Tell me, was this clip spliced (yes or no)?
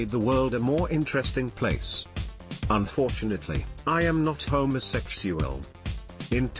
no